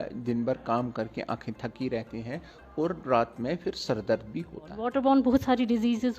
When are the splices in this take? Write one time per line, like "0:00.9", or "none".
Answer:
0:04.8